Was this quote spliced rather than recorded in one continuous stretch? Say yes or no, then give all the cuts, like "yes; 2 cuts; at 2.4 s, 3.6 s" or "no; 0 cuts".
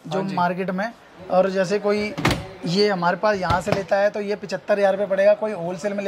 no; 0 cuts